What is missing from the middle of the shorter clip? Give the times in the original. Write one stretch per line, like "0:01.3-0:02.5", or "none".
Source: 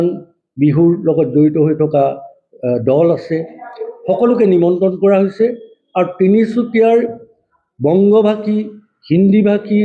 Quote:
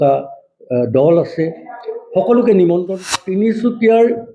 0:05.0-0:06.0